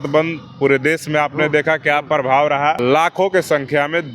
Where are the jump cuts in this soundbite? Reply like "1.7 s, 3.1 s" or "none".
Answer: 2.8 s